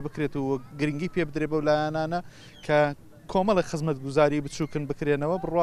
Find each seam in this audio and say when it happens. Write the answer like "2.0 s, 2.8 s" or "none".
none